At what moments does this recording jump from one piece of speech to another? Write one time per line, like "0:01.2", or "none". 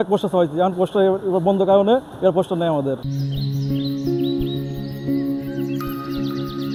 none